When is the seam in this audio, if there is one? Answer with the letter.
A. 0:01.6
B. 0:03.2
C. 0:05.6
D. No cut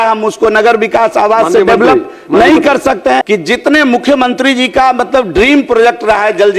B